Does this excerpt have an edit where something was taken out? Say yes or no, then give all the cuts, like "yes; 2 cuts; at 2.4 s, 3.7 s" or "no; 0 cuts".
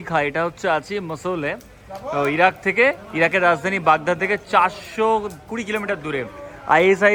no; 0 cuts